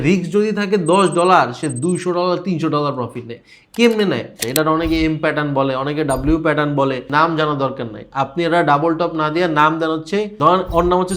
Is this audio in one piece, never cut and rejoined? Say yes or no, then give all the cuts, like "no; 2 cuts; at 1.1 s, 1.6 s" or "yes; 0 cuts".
no; 3 cuts; at 4.4 s, 7.1 s, 10.3 s